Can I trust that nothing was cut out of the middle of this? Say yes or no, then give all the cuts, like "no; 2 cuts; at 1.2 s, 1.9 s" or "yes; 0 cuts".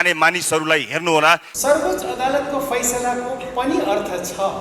no; 1 cut; at 1.5 s